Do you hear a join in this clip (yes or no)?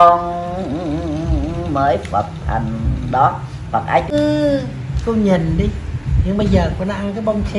yes